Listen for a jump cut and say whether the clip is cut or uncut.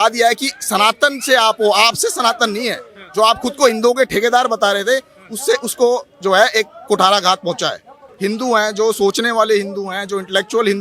cut